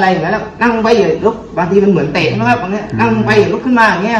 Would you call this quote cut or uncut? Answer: uncut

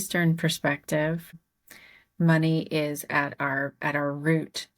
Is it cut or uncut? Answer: cut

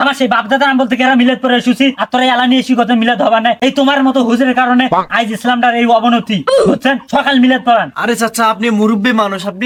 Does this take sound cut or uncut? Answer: uncut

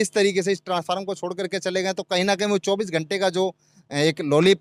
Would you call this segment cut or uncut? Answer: uncut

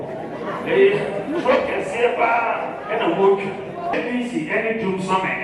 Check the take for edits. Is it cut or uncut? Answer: cut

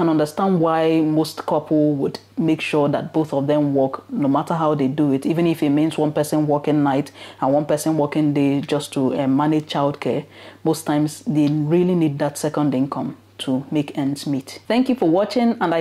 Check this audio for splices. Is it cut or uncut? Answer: uncut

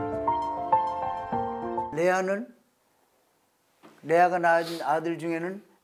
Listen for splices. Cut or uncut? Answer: uncut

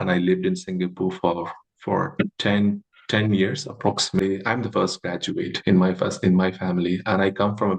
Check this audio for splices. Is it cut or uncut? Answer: cut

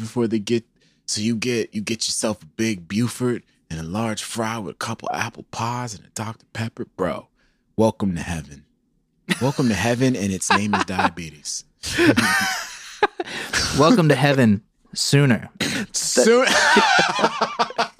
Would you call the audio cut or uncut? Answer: cut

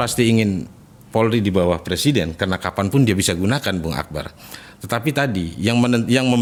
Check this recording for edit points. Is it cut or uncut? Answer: uncut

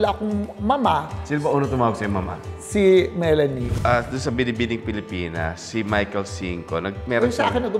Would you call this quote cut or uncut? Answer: cut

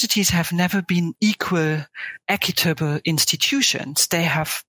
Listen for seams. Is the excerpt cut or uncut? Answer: cut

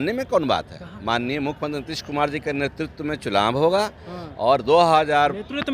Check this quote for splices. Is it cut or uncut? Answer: uncut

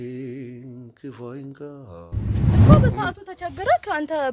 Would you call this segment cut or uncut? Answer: cut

